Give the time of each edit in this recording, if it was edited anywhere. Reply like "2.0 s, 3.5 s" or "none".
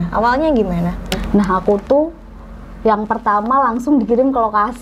1.2 s